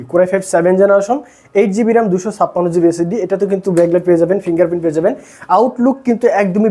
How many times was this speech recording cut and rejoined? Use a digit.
0